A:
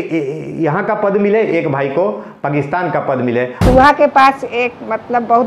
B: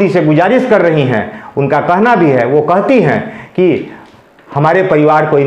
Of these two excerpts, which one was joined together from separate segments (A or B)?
A